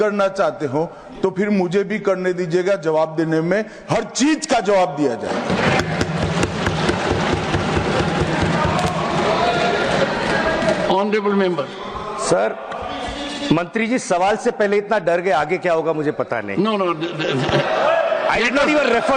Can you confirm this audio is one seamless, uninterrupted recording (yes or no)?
yes